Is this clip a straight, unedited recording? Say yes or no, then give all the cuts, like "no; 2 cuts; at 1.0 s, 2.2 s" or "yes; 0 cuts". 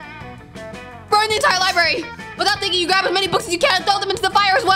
no; 1 cut; at 1.1 s